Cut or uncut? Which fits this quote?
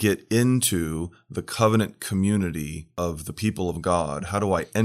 cut